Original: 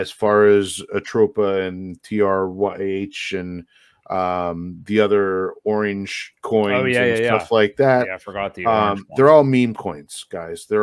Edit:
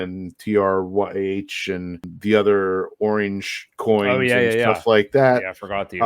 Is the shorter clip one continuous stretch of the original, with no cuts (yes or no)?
no